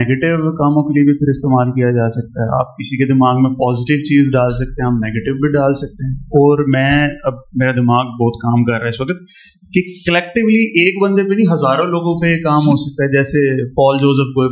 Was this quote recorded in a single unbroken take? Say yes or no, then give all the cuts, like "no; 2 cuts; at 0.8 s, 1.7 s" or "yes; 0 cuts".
yes; 0 cuts